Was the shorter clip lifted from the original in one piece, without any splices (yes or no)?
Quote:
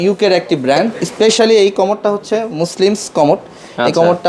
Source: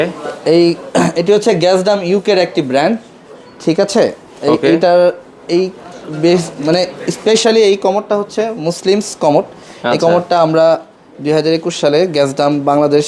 no